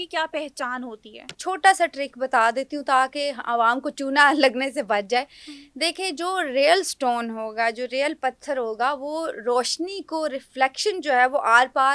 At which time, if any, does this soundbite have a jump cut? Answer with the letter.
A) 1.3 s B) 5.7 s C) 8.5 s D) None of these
A